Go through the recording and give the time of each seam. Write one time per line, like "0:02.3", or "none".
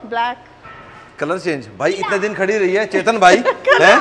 none